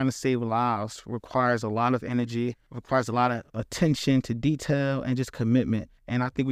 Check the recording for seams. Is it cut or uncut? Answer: uncut